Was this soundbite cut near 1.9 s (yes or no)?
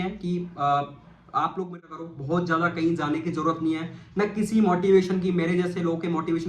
yes